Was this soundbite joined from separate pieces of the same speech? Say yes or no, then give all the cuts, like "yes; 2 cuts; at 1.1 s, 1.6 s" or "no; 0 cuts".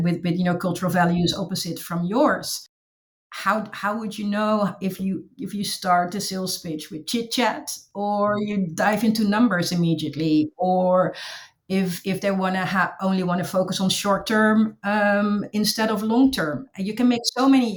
no; 0 cuts